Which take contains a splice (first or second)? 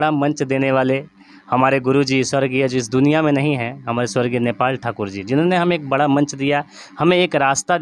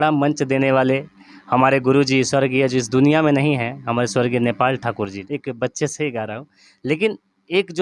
second